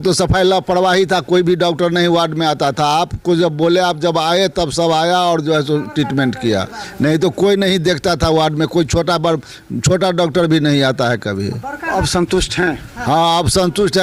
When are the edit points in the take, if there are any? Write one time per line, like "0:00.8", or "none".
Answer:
0:11.9